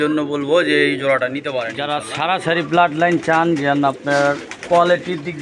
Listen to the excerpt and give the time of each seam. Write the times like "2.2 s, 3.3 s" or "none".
1.7 s